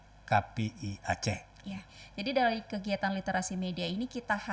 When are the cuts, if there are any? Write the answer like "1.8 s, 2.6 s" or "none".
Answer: 1.9 s